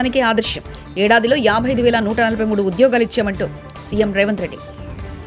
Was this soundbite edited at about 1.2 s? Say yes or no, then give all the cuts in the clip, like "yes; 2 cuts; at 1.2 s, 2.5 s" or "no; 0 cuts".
no; 0 cuts